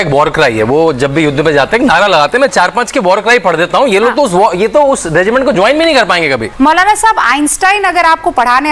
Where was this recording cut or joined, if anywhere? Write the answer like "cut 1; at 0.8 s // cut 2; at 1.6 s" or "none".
cut 1; at 6.5 s